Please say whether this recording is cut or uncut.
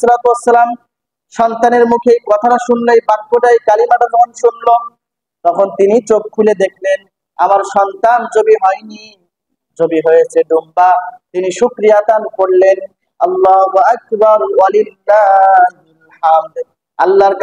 uncut